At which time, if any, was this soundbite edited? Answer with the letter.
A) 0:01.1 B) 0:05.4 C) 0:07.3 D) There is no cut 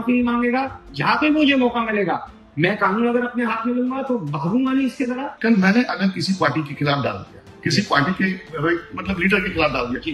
B